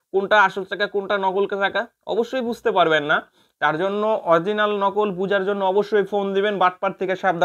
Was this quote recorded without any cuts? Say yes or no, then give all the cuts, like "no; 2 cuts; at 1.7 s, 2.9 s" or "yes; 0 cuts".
yes; 0 cuts